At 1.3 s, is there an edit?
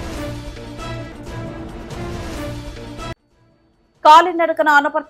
no; 1 cut; at 3.1 s

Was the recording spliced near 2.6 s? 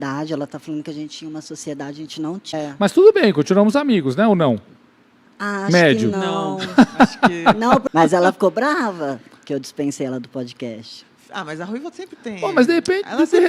yes; 2 cuts; at 2.6 s, 7.8 s

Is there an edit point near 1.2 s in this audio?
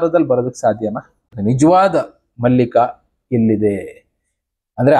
yes; 1 cut; at 1.2 s

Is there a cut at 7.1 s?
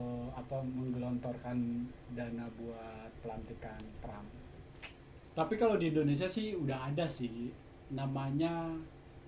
no; 1 cut; at 4.6 s

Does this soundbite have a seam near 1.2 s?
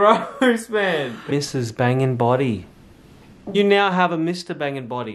yes; 2 cuts; at 1.2 s, 3.5 s

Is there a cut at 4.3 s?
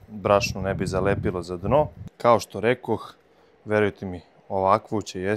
no; 1 cut; at 2.0 s

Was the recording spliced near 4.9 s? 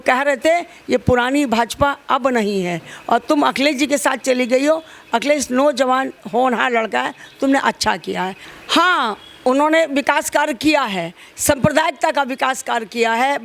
no; 1 cut; at 8.4 s

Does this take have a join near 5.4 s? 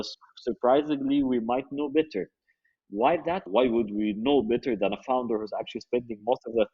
no; 1 cut; at 3.5 s

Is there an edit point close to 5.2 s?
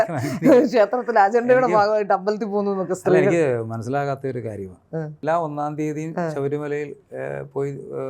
yes; 1 cut; at 5.2 s

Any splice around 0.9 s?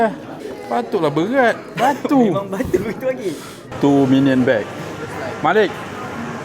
no; 1 cut; at 3.6 s

